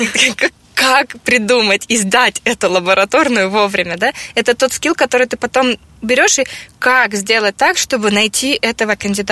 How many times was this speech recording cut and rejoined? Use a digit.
0